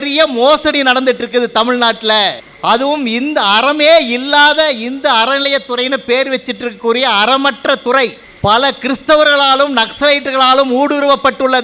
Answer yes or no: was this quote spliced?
yes